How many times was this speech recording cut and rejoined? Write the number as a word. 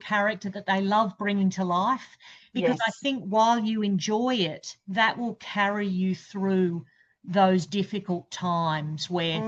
zero